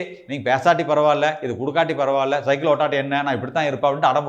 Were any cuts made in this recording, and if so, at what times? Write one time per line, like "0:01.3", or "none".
none

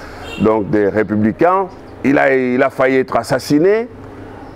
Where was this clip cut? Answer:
0:01.8

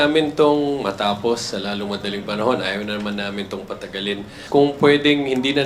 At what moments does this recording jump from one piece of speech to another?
0:04.4

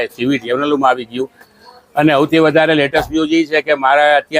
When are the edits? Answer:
none

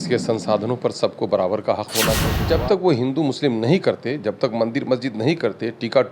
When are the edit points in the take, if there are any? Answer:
0:02.3

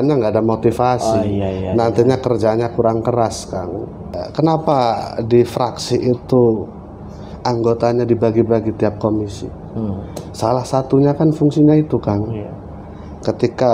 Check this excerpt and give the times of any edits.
0:04.1

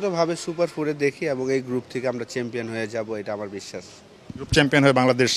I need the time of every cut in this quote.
none

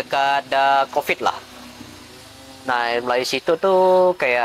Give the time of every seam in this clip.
none

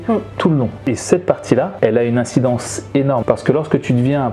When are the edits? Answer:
0:00.8
0:03.2

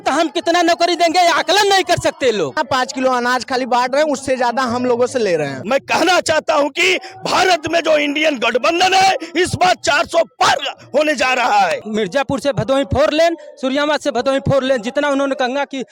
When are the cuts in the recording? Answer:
0:02.6
0:05.6
0:11.8

